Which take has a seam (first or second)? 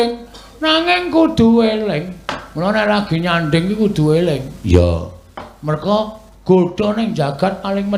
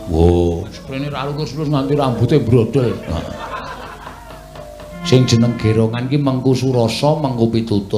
second